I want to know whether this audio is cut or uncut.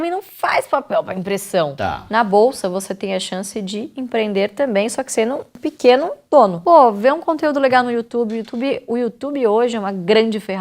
cut